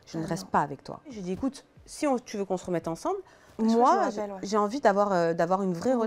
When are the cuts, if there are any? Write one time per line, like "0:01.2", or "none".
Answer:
0:01.2